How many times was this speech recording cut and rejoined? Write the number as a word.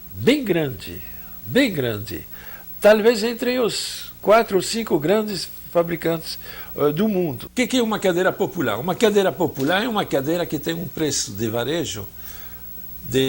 one